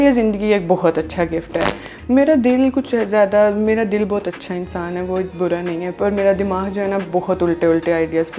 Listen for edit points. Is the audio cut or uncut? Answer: cut